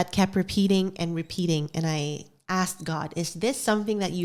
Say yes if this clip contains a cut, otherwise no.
no